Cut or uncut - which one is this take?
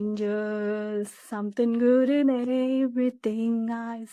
uncut